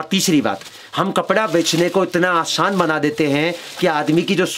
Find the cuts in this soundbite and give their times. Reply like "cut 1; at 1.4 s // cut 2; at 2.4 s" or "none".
none